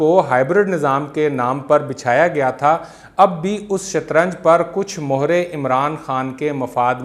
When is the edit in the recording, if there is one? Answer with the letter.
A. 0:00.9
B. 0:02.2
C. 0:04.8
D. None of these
D